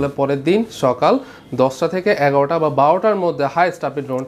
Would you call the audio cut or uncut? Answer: uncut